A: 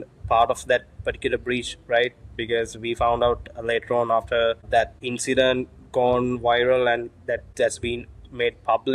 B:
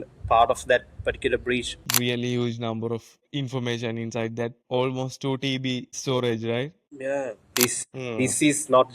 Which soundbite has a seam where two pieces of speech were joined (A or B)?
B